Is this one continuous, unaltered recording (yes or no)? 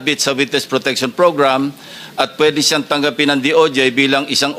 yes